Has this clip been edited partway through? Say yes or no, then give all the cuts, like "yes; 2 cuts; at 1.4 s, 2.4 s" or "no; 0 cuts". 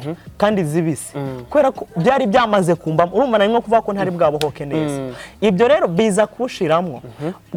no; 0 cuts